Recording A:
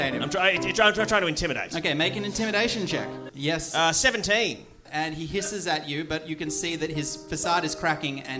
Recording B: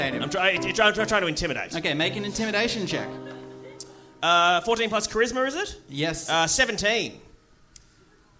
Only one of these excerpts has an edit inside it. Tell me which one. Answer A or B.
A